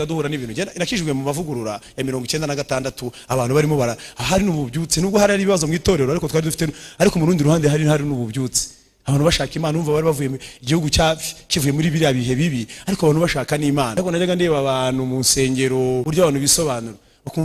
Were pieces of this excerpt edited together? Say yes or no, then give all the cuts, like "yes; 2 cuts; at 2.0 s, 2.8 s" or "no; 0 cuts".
yes; 2 cuts; at 13.9 s, 16.1 s